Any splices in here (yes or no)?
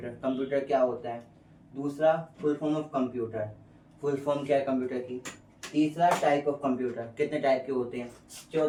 no